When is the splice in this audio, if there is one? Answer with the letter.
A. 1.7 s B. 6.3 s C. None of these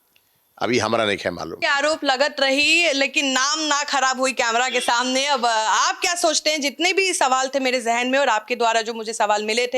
C